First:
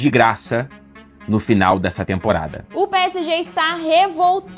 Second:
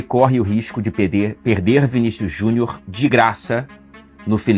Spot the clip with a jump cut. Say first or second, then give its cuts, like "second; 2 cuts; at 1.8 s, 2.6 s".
first; 1 cut; at 2.6 s